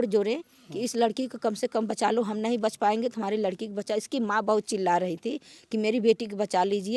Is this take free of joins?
yes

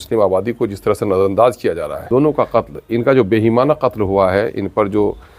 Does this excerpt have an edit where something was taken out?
yes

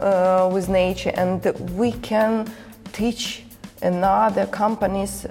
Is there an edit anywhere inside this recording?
no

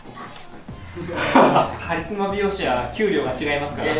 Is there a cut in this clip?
yes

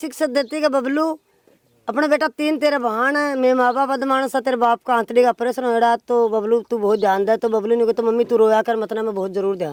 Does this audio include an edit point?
no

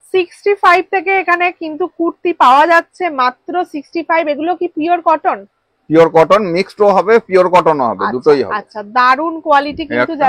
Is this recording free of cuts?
yes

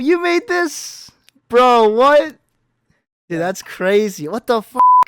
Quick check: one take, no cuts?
yes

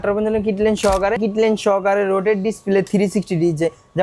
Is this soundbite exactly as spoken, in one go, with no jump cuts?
no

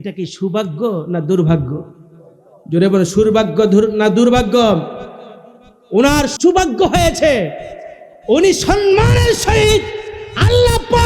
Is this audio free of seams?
no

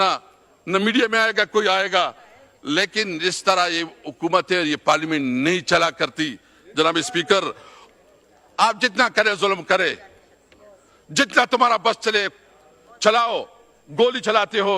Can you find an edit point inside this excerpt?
yes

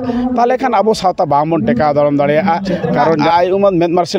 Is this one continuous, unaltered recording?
no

